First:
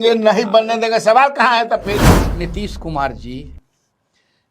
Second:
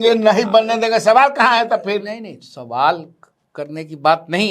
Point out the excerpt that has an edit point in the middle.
first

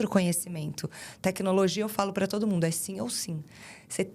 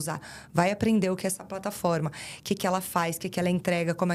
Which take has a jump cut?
first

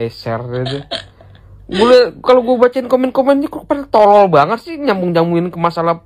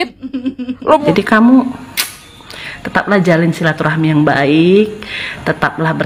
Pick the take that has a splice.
second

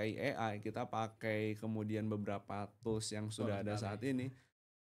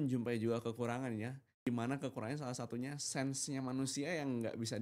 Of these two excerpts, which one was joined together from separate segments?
second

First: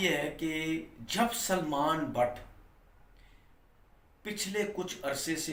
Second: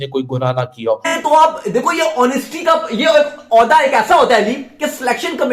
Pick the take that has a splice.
second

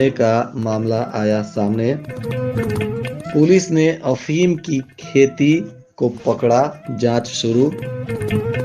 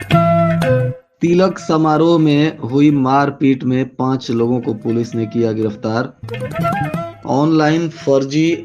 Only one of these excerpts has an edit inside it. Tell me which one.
second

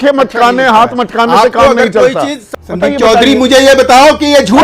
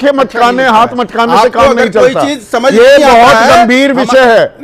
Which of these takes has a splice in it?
first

